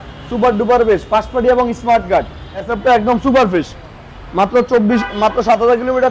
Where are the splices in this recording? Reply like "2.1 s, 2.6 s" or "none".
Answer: 2.7 s